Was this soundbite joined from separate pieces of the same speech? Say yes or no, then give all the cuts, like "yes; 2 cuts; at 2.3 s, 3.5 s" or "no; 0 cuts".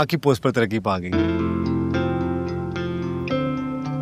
no; 0 cuts